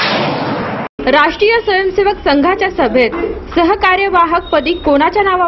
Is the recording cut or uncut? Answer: cut